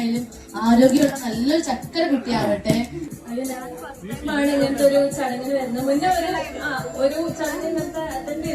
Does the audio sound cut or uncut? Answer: cut